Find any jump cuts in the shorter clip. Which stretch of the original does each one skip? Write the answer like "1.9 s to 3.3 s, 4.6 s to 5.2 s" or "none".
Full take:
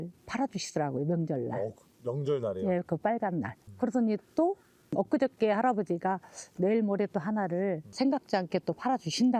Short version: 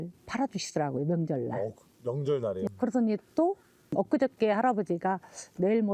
2.7 s to 3.7 s